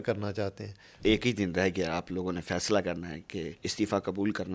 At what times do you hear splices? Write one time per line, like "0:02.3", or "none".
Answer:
0:00.9
0:03.6